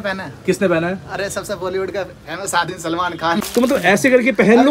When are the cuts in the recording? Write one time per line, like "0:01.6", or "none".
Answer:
0:03.5